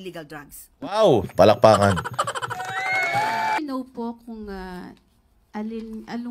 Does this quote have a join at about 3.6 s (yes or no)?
yes